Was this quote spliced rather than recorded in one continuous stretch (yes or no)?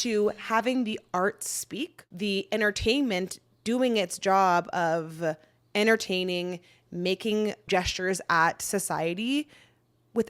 yes